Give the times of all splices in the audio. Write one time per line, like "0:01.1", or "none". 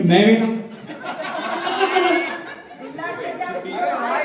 none